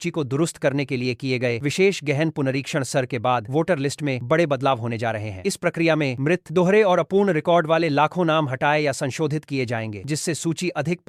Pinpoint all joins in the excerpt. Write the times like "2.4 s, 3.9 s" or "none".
none